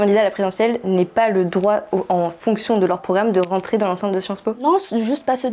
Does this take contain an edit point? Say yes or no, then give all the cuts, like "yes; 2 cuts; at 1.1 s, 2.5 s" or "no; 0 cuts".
no; 0 cuts